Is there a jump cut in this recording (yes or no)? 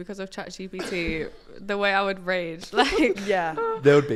no